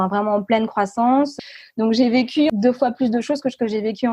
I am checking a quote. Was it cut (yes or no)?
yes